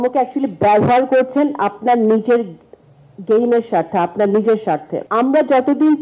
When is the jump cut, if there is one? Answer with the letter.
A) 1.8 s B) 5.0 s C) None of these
B